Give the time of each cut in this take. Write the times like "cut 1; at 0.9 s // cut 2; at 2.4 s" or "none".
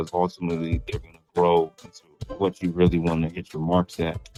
none